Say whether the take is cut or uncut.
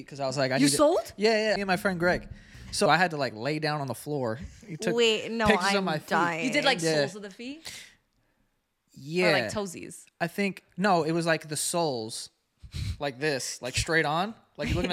cut